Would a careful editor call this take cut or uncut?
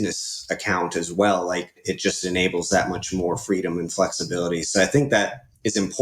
cut